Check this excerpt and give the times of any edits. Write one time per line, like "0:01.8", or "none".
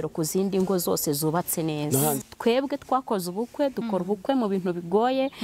0:02.2